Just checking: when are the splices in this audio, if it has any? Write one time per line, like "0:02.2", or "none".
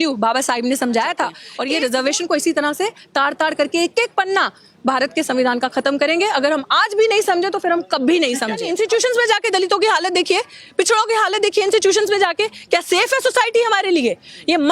0:01.5
0:08.7